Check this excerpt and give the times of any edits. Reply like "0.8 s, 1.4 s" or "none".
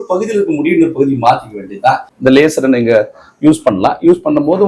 2.1 s